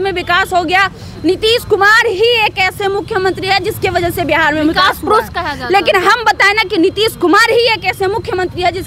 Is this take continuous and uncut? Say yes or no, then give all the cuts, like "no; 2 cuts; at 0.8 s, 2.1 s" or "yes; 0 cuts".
yes; 0 cuts